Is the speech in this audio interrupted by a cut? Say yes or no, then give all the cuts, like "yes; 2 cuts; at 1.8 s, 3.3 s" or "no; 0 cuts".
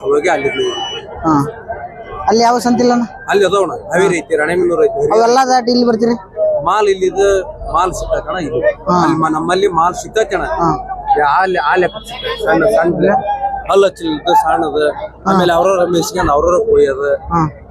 no; 0 cuts